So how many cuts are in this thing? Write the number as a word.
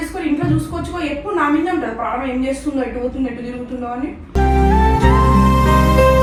zero